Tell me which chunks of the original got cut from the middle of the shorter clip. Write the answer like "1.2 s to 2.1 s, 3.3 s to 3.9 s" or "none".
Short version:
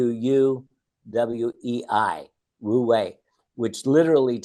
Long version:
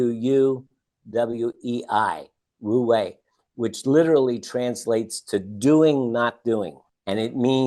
none